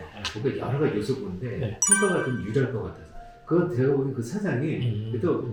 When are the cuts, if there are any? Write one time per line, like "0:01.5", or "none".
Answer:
none